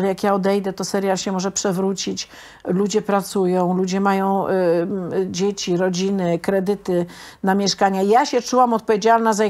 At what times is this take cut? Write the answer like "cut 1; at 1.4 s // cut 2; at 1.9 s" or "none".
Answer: none